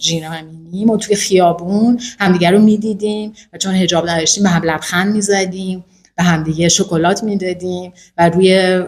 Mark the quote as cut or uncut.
uncut